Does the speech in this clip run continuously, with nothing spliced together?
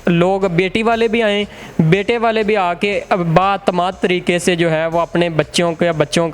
yes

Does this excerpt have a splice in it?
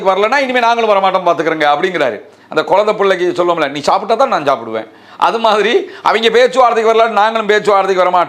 no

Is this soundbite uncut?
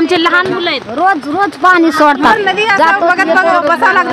no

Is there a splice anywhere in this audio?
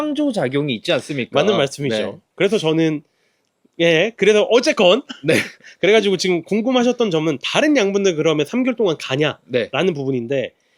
no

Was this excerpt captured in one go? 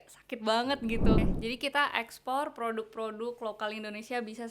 no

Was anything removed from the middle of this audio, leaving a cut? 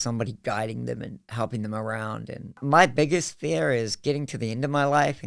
yes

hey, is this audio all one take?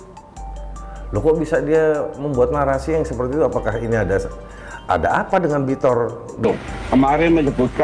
no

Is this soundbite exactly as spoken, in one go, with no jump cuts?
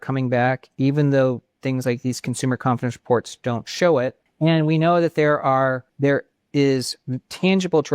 no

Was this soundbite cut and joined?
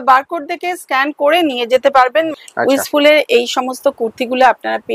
yes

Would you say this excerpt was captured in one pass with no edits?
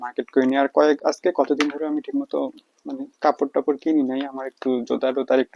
yes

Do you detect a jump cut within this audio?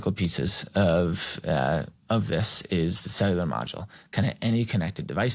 no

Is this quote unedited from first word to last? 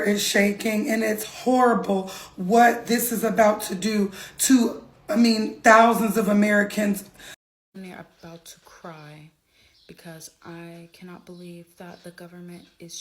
no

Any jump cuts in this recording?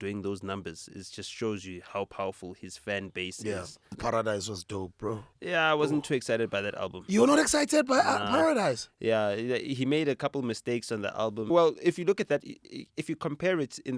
yes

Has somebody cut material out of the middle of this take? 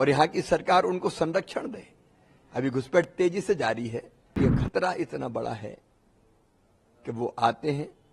yes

